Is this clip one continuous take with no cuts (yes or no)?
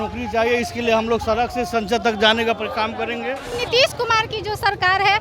no